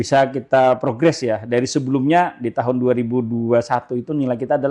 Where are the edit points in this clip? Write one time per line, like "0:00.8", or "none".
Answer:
none